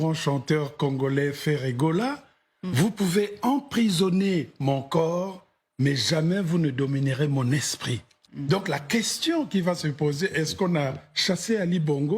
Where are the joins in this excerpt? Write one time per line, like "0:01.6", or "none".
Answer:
0:08.2